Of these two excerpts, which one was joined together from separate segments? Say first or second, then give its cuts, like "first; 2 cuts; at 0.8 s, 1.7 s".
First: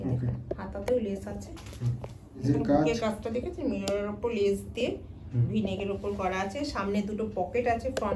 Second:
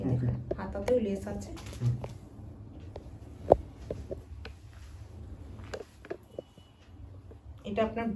first; 1 cut; at 2.4 s